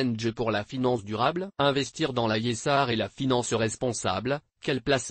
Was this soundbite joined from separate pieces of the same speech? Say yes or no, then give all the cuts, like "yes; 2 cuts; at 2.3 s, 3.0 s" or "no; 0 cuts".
yes; 1 cut; at 1.5 s